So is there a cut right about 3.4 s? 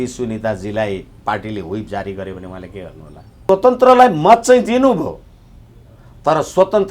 yes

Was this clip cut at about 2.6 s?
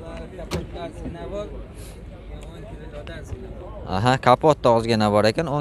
no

